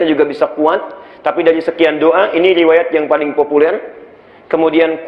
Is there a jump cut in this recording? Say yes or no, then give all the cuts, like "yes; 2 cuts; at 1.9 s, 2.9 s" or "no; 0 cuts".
no; 0 cuts